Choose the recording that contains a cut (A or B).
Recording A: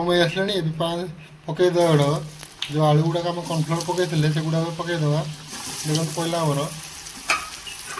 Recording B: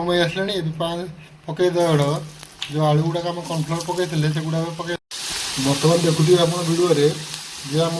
B